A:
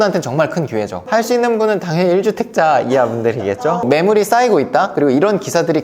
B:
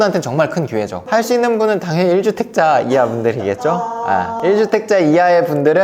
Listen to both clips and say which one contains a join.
A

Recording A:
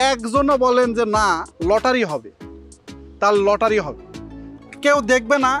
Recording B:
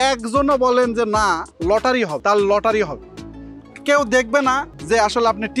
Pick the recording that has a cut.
B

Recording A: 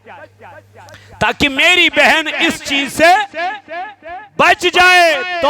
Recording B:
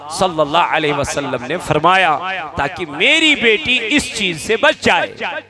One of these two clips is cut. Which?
A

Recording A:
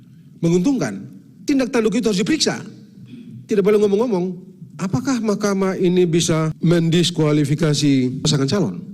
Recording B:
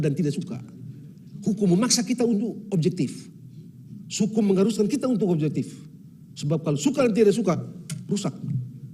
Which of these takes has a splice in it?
A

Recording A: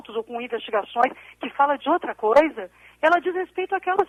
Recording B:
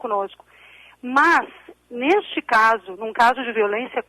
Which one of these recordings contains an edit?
B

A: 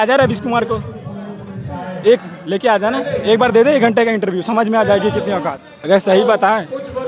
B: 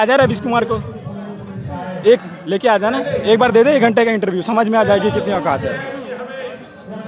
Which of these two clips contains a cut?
A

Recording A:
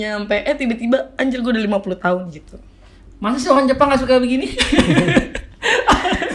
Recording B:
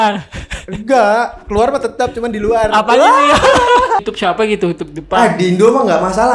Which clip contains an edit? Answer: B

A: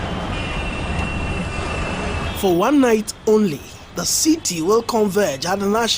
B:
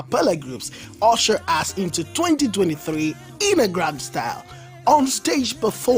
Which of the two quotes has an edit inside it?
A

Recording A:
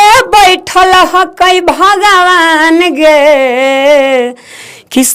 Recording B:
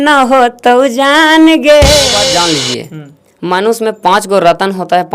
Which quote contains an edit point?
B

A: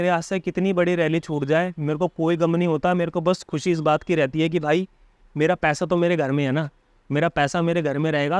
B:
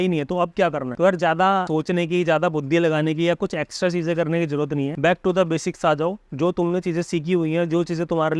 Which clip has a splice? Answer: B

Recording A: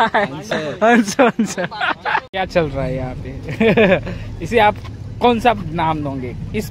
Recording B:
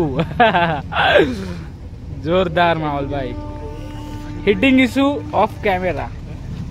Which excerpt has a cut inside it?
A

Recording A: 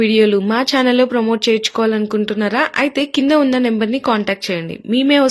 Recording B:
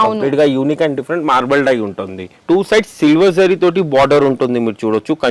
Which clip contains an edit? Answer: B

